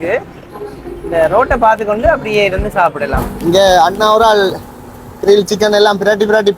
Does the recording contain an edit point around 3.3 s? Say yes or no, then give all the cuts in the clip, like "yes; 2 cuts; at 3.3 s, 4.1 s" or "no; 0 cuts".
yes; 1 cut; at 3.3 s